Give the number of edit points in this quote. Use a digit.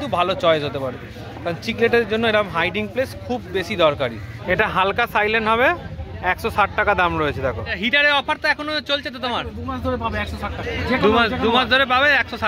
2